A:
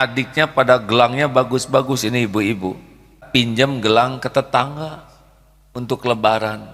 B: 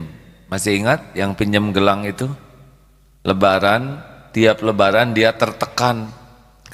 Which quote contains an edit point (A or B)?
A